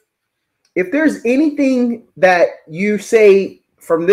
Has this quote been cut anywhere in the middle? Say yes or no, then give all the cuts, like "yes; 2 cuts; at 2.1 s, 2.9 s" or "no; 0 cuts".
no; 0 cuts